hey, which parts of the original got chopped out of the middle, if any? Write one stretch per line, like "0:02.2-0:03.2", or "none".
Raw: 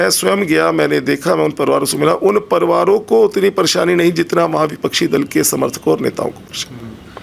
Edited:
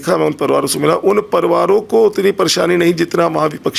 none